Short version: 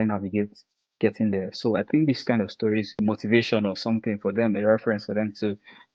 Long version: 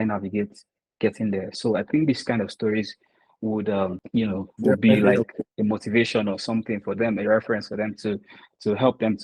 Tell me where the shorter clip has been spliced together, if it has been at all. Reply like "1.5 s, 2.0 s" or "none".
2.9 s